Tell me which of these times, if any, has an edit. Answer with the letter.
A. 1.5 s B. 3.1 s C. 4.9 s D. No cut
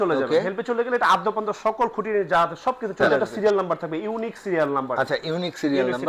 B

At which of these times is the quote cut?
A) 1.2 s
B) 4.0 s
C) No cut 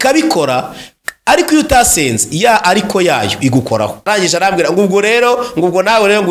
B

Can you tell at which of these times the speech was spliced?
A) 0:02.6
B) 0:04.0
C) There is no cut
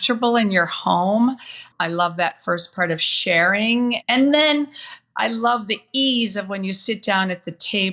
B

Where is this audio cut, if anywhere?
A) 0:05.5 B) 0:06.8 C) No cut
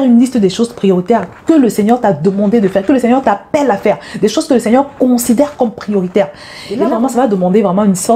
B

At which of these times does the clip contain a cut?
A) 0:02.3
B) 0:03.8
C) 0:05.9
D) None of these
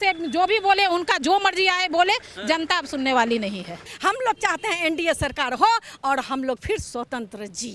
B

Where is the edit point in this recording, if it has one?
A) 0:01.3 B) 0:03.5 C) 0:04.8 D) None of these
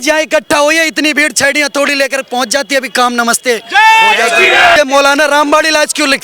C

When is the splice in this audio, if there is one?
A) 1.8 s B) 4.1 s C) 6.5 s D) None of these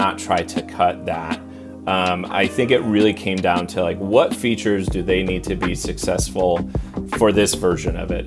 D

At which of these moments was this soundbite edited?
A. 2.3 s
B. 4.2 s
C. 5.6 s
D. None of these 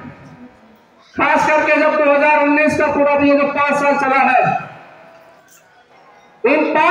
D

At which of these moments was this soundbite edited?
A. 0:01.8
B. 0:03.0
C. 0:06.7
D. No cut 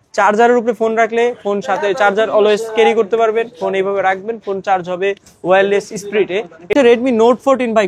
C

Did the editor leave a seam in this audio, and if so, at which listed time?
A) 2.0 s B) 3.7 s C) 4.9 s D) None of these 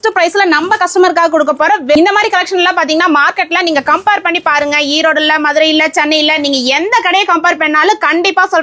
A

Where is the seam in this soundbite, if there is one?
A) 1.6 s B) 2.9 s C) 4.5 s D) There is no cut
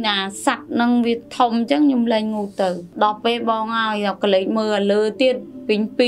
B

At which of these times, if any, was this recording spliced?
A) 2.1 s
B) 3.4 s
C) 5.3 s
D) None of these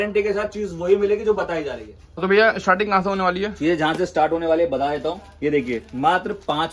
D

